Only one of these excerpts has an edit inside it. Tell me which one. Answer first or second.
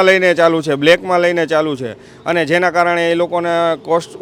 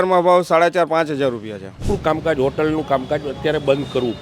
second